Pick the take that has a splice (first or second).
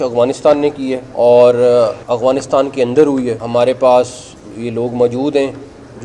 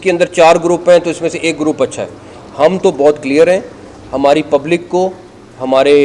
first